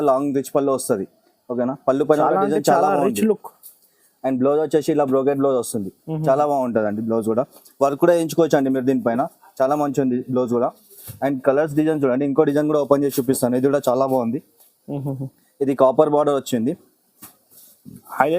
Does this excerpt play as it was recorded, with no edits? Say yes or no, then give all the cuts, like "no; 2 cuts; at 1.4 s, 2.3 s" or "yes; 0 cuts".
yes; 0 cuts